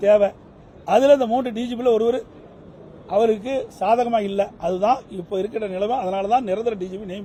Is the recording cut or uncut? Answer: uncut